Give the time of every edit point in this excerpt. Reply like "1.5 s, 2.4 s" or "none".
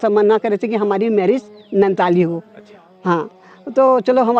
none